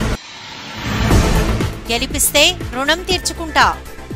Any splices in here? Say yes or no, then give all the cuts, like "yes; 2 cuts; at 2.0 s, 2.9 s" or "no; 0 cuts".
yes; 1 cut; at 1.1 s